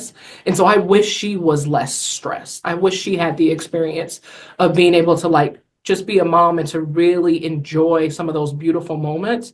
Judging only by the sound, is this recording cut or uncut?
uncut